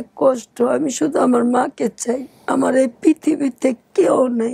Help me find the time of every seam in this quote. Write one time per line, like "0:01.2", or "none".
0:02.3